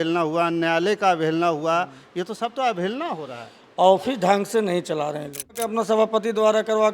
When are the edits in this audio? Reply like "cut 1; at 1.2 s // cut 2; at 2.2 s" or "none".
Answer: cut 1; at 5.7 s